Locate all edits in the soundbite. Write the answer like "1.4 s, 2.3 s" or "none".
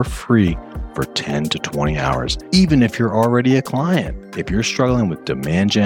2.3 s